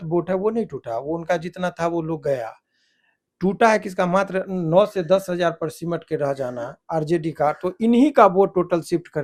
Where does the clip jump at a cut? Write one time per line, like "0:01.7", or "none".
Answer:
none